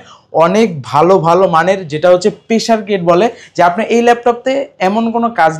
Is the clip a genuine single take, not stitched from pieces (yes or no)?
yes